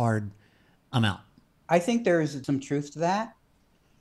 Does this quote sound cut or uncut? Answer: cut